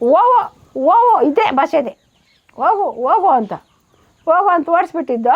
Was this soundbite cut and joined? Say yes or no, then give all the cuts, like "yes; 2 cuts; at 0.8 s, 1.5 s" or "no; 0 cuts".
no; 0 cuts